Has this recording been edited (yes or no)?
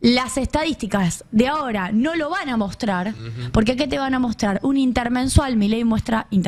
no